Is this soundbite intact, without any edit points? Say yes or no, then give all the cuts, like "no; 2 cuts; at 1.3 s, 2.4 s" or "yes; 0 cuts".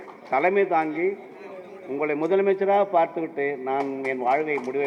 yes; 0 cuts